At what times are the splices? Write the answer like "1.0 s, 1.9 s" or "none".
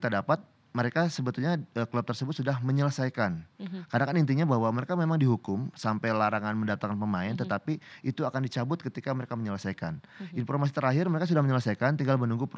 none